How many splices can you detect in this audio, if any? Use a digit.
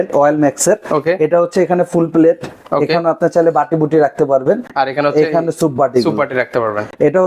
0